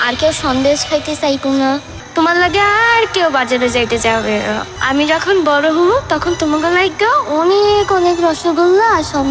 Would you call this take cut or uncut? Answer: cut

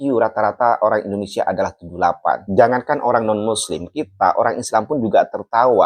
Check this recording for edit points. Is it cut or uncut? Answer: cut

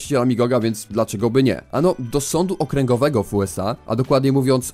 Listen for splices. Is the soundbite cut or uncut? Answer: uncut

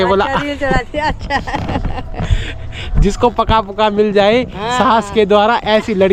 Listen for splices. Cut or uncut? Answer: uncut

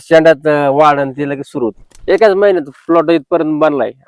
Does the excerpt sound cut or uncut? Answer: cut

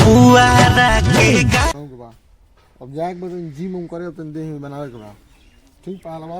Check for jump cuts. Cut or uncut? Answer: cut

